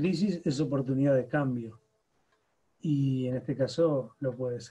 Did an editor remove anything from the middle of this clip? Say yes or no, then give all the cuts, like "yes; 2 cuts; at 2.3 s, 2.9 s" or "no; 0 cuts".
no; 0 cuts